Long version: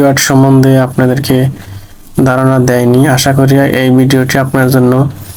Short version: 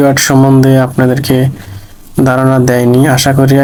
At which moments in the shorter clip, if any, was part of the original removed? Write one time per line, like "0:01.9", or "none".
none